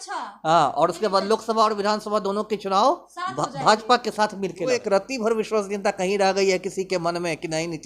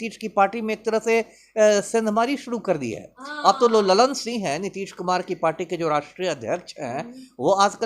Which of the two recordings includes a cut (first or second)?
first